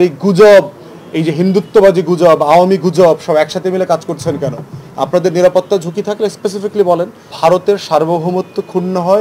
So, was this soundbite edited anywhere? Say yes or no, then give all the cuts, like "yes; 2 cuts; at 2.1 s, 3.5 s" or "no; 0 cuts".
yes; 1 cut; at 7.3 s